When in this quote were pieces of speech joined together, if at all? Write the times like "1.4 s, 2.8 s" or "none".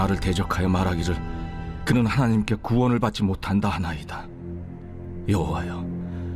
4.6 s